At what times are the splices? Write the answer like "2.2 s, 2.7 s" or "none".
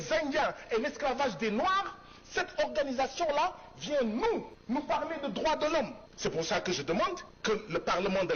4.5 s, 6.0 s, 7.3 s